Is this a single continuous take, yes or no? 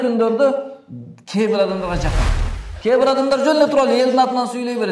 no